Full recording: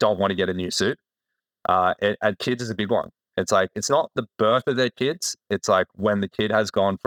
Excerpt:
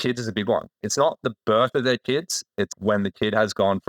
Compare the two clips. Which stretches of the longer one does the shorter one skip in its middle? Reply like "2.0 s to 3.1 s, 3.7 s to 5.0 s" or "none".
3.3 s to 3.8 s, 5.6 s to 5.9 s